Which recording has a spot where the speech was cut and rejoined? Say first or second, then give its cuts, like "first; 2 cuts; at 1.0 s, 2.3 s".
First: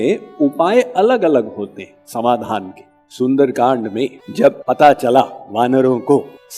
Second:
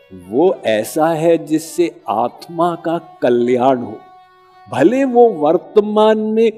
first; 1 cut; at 2.9 s